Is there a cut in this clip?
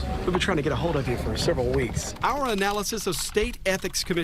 no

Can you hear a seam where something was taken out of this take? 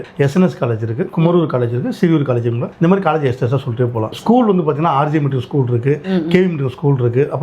no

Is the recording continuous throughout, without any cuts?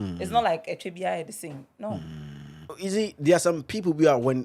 no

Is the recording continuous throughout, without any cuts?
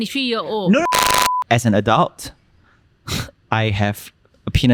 no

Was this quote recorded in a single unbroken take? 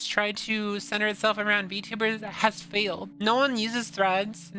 no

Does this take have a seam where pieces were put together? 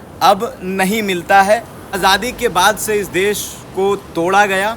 yes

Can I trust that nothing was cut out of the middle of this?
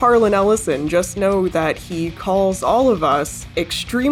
yes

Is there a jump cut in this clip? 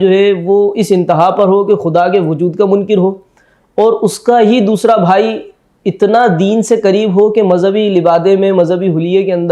no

